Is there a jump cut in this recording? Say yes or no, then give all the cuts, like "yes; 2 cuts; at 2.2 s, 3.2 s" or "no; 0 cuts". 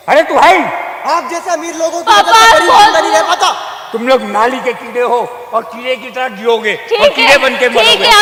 no; 0 cuts